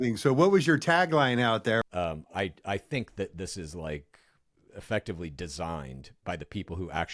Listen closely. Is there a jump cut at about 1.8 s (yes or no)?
yes